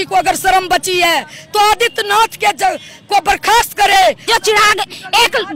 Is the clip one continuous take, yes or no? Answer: no